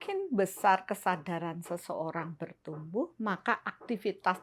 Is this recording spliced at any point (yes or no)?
no